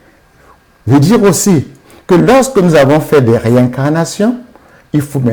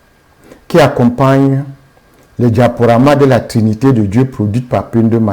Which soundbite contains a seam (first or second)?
second